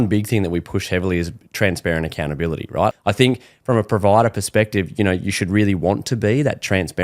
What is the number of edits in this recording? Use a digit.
1